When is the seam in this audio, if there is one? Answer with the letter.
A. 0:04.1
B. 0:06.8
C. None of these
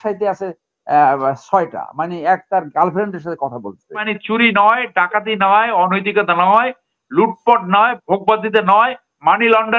A